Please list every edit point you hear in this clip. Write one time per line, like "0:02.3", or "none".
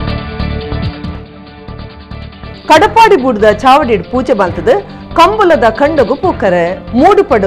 0:01.2